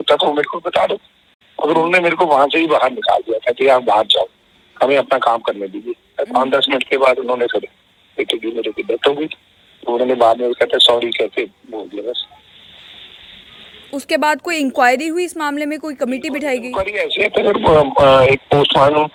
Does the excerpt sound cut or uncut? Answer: uncut